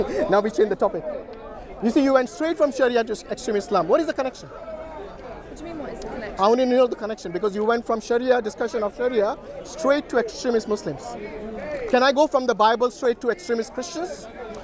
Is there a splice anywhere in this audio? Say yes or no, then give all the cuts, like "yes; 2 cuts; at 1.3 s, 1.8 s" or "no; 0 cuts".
no; 0 cuts